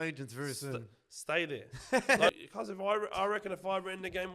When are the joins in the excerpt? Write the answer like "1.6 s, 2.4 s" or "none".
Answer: 2.3 s